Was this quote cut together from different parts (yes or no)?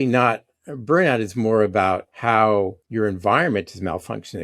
yes